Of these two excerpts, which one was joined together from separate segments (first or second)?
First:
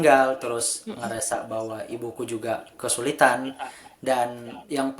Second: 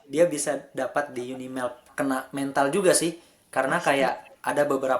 second